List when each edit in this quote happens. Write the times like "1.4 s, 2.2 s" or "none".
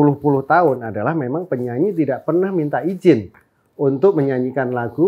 none